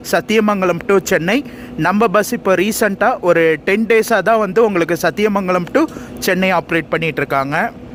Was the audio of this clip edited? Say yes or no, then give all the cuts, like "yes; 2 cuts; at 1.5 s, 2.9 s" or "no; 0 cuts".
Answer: no; 0 cuts